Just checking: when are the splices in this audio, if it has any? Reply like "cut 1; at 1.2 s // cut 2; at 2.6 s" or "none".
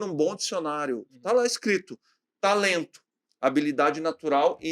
cut 1; at 1.1 s